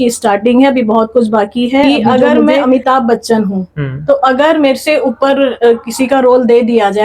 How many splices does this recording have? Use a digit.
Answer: 1